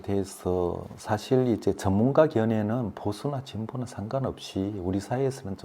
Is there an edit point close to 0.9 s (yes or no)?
yes